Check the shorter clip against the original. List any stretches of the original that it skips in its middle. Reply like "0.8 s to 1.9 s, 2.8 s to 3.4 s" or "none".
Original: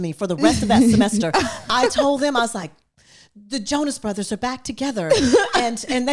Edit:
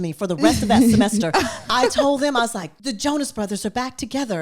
2.7 s to 3.3 s